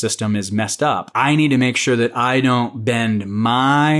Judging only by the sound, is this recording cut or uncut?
cut